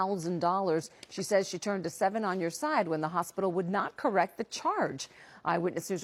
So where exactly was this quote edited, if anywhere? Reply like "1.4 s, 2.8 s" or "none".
none